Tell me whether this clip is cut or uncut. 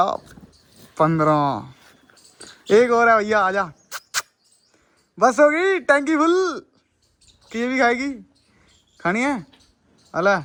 uncut